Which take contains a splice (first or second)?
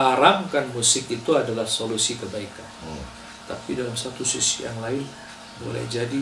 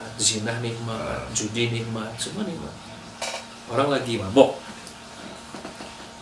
second